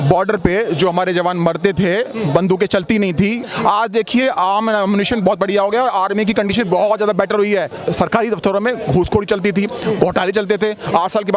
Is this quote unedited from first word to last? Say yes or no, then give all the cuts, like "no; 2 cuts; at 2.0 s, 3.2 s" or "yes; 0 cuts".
no; 2 cuts; at 3.4 s, 7.7 s